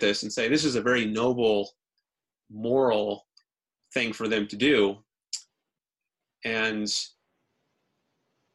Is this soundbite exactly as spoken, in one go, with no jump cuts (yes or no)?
no